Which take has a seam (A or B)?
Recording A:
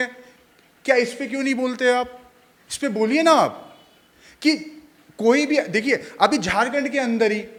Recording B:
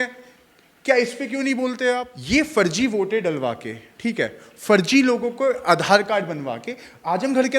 B